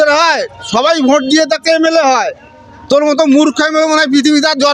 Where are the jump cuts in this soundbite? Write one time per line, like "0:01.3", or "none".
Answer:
none